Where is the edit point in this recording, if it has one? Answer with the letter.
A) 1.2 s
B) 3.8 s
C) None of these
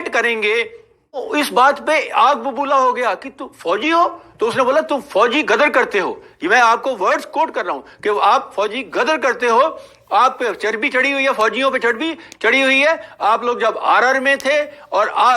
A